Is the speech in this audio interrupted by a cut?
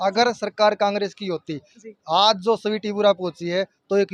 no; 0 cuts

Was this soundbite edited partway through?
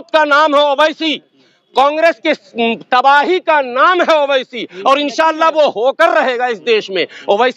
no; 0 cuts

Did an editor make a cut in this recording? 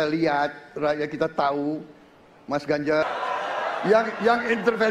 yes; 1 cut; at 3.0 s

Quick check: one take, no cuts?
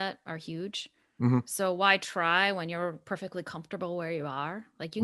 yes; 0 cuts

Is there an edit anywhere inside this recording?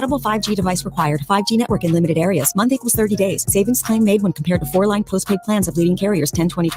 no; 0 cuts

